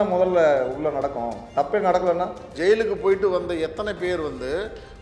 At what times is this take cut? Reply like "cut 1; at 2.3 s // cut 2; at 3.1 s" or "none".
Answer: cut 1; at 2.5 s